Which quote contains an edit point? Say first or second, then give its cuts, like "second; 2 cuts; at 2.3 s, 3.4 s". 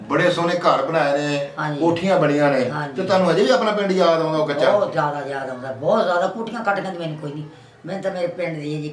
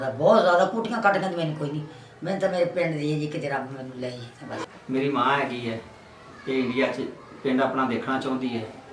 second; 1 cut; at 4.6 s